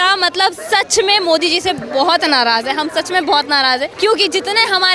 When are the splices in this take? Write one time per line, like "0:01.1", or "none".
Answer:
0:03.9